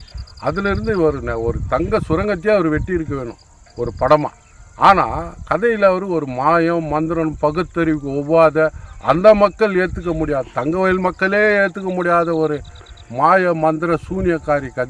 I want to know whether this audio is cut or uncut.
uncut